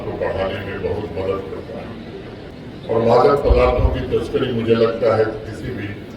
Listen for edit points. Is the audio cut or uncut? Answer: cut